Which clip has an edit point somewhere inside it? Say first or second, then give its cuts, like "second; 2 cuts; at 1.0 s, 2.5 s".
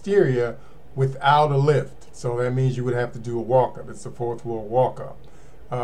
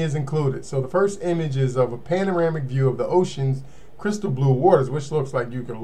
first; 1 cut; at 2.0 s